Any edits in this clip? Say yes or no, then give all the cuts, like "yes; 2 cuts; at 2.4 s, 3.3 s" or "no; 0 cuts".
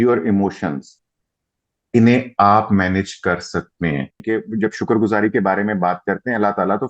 yes; 1 cut; at 4.2 s